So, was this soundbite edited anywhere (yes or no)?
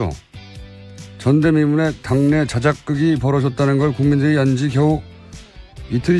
no